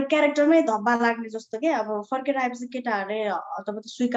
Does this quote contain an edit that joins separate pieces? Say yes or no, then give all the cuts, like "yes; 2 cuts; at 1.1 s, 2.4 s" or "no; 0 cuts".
no; 0 cuts